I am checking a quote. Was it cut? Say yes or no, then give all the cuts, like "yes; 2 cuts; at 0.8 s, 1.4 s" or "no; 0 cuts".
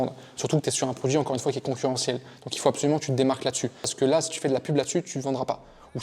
yes; 1 cut; at 3.9 s